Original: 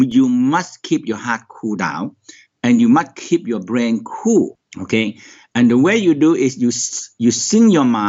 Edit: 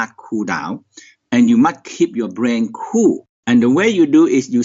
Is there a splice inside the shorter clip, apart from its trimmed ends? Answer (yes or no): yes